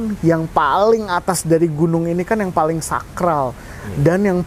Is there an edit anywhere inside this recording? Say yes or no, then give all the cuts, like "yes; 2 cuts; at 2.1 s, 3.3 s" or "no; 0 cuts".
no; 0 cuts